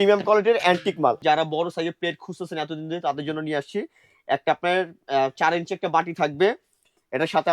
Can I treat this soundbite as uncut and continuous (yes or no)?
no